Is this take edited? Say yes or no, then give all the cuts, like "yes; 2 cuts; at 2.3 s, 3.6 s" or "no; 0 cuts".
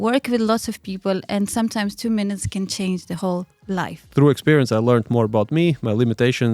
yes; 1 cut; at 4.0 s